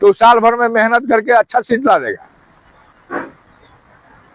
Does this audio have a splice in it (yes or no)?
no